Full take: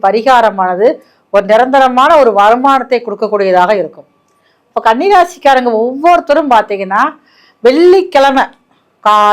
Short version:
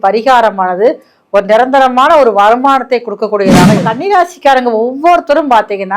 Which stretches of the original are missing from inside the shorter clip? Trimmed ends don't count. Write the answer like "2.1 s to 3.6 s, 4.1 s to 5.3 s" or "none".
3.8 s to 4.8 s

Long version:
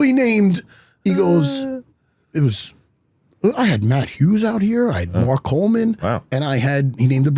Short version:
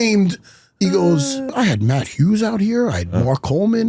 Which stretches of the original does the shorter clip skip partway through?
1.8 s to 3.5 s

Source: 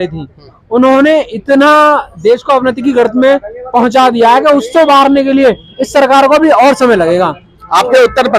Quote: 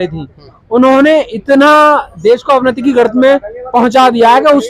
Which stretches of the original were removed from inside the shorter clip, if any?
none

